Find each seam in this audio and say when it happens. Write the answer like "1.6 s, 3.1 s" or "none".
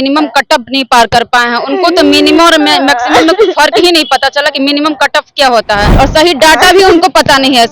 5.9 s